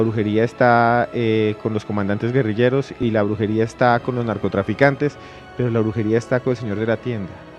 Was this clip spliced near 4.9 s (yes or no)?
no